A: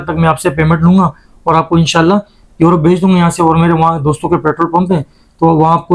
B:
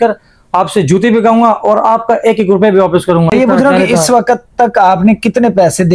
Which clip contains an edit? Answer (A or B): B